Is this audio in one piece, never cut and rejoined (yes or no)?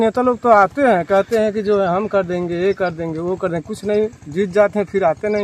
yes